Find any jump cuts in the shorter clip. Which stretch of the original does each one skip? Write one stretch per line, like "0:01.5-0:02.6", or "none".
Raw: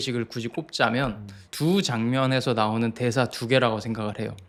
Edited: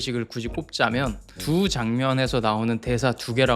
0:01.3-0:01.4